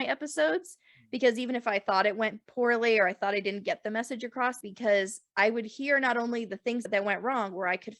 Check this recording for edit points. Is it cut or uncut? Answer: cut